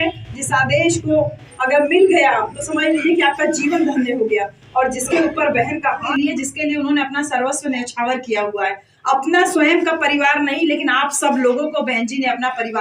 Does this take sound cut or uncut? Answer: cut